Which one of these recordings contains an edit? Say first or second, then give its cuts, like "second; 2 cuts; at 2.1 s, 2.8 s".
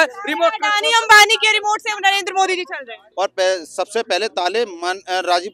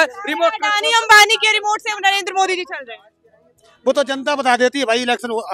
first; 1 cut; at 3.0 s